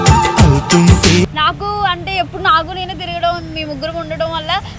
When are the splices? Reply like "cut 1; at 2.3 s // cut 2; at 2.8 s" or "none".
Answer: cut 1; at 1.3 s

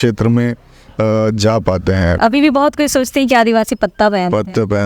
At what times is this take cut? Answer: cut 1; at 2.2 s

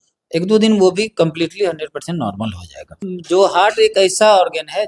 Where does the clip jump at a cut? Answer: cut 1; at 2.9 s

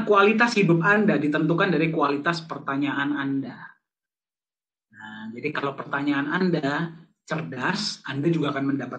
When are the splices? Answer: none

